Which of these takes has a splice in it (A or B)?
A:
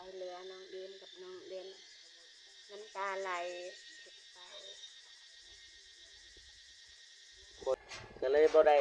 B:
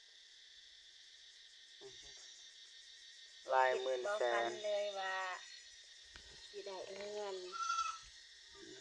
A